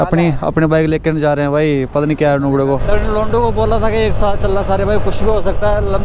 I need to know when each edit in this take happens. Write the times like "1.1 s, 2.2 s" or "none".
2.8 s